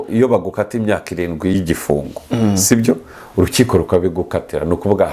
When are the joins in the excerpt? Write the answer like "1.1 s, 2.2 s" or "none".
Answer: 1.5 s